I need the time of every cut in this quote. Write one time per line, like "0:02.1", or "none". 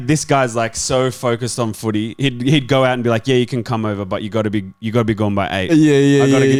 none